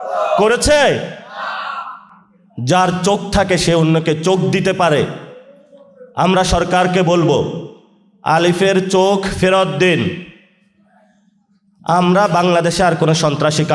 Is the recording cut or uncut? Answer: uncut